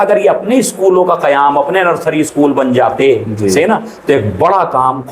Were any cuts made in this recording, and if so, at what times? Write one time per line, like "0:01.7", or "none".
none